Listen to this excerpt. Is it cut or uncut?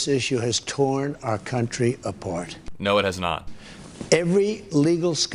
uncut